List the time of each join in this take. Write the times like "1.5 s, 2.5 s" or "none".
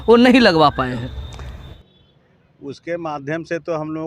1.7 s